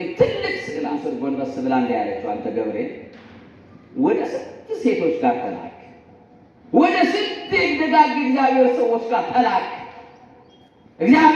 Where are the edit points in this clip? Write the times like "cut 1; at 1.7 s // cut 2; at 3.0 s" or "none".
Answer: cut 1; at 0.9 s